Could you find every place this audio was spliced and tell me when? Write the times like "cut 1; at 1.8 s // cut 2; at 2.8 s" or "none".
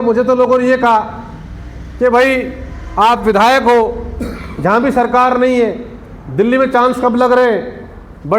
none